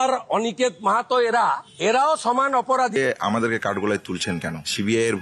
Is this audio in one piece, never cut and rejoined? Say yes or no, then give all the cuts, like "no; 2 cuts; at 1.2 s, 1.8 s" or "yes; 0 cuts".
no; 1 cut; at 2.9 s